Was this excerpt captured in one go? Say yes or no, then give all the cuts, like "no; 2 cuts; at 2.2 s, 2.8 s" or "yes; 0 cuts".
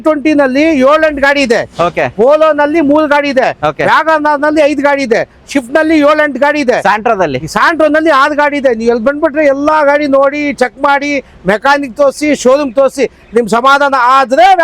yes; 0 cuts